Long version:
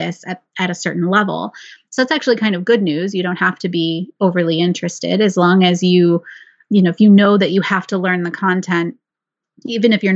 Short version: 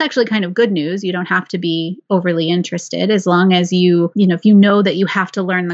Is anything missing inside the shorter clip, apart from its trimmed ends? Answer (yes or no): yes